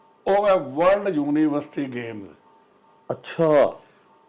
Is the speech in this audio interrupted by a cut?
no; 0 cuts

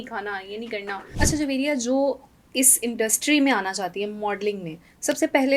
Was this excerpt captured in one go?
no; 1 cut; at 1.0 s

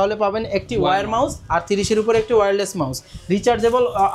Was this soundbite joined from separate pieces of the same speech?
no; 0 cuts

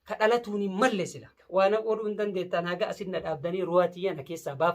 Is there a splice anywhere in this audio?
yes; 1 cut; at 1.3 s

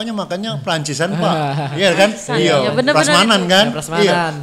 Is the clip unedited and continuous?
yes; 0 cuts

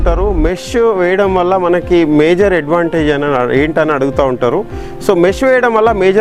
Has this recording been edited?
no; 0 cuts

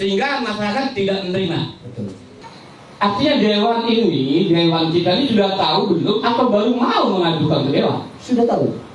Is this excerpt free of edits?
no; 1 cut; at 2.3 s

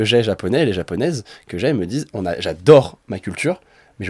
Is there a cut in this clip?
no; 0 cuts

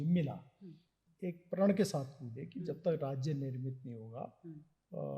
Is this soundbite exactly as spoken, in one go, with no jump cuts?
no; 1 cut; at 1.0 s

